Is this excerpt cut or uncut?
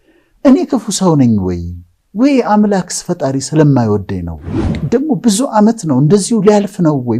cut